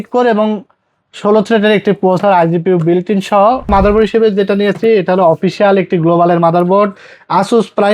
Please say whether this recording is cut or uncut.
cut